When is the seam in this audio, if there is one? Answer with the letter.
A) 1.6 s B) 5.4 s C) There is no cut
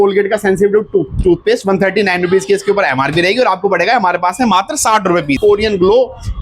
B